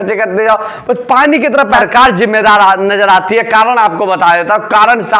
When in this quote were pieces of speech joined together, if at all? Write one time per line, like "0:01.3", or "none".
0:01.8